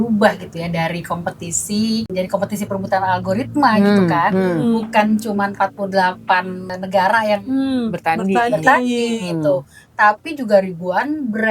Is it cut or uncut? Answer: cut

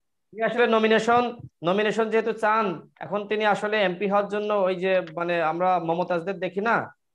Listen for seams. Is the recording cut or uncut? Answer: uncut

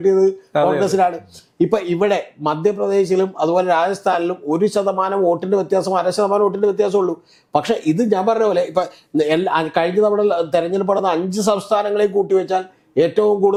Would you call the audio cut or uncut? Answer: uncut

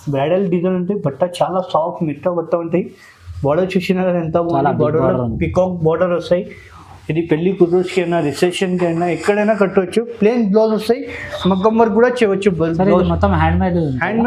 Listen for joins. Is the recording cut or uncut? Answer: uncut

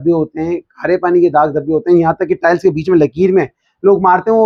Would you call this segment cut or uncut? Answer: uncut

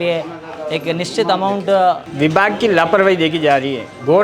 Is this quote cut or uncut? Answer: cut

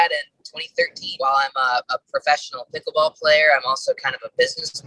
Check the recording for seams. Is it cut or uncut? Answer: cut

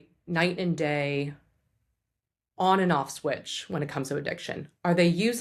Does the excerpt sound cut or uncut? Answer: uncut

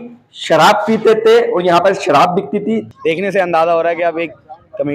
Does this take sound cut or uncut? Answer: cut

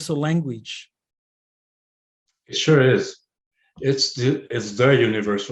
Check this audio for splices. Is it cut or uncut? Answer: uncut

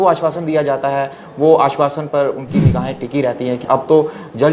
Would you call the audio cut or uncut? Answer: cut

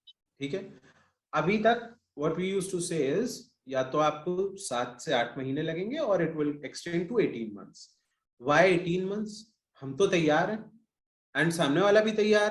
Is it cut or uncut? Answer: uncut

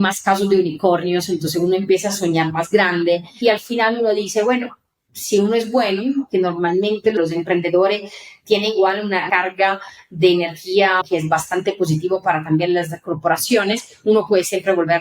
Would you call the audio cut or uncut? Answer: cut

